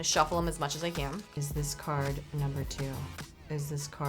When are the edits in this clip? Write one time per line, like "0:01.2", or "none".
0:01.3